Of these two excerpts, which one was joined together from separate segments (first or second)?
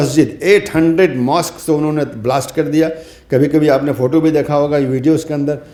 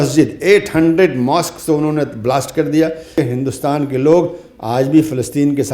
second